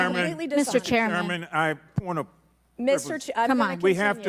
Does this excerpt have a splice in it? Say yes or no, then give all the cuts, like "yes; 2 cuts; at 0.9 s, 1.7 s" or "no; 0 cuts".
no; 0 cuts